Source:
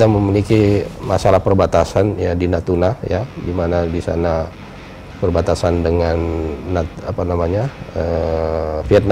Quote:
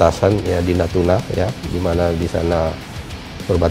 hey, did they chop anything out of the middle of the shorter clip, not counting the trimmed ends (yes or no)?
no